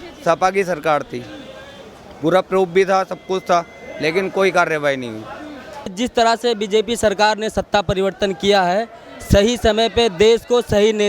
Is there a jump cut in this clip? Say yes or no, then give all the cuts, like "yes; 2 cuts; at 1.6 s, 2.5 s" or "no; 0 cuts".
yes; 1 cut; at 5.9 s